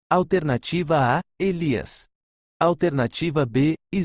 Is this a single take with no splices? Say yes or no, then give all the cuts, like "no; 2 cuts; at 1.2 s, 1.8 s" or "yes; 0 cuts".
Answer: yes; 0 cuts